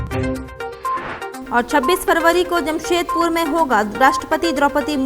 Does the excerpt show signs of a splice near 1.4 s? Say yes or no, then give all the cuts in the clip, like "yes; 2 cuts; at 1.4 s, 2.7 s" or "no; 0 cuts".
yes; 1 cut; at 1.4 s